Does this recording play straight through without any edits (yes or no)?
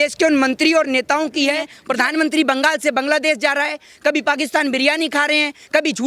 no